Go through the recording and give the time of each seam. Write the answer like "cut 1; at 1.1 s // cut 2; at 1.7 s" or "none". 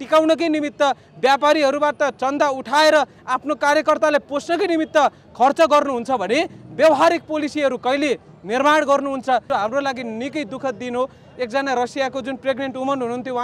cut 1; at 9.4 s